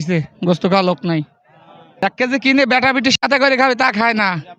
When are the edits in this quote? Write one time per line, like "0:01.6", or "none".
0:02.0

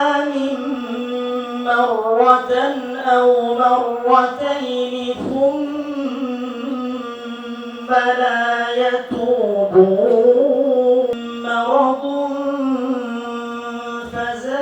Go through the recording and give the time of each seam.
0:11.1

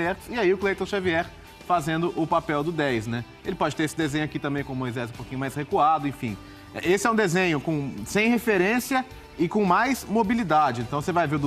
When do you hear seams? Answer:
none

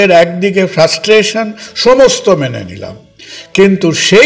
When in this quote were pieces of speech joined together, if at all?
none

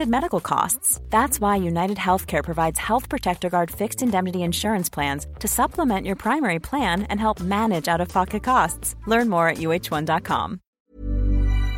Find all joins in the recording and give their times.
0:10.7

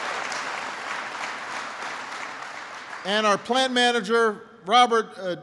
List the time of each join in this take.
none

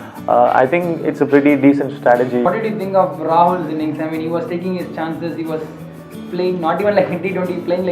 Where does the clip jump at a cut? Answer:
0:02.4

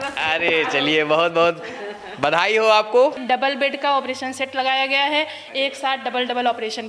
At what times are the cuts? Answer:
0:03.2

